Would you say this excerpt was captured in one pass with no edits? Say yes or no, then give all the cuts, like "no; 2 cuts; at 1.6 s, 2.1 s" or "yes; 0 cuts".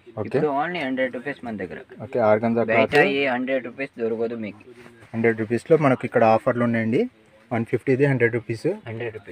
yes; 0 cuts